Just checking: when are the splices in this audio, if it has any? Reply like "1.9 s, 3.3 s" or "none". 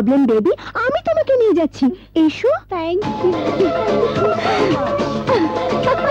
none